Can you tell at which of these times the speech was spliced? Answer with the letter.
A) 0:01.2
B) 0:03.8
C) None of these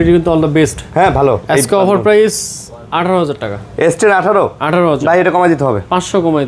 C